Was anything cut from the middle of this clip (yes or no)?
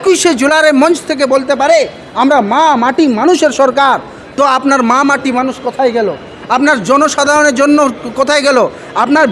no